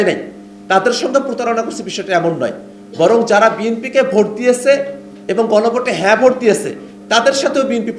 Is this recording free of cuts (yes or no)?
yes